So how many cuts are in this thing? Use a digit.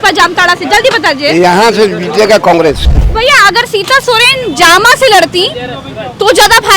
1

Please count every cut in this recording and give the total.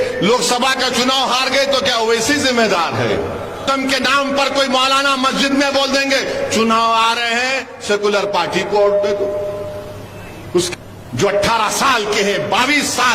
2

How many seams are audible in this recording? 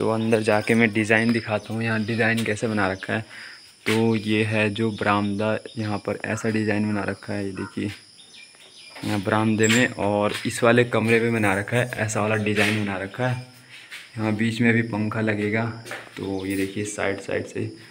0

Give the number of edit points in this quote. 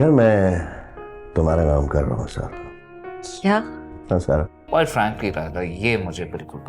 1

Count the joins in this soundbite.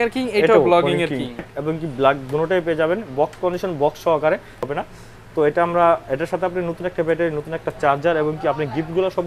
2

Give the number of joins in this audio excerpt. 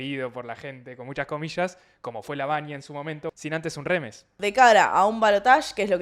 2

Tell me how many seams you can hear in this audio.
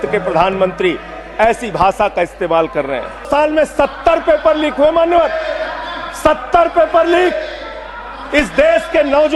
1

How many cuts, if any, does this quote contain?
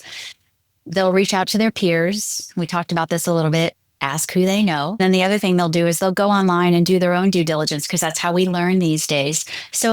1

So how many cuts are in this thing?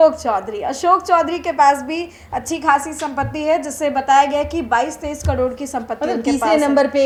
0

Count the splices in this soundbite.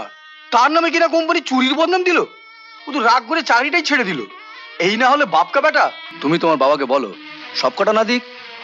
1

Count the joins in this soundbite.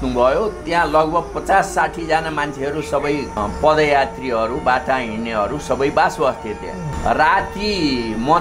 2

